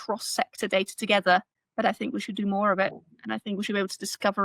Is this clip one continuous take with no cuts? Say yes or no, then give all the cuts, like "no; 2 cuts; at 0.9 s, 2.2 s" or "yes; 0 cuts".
yes; 0 cuts